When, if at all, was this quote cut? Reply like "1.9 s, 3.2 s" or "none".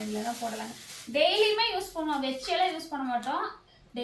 none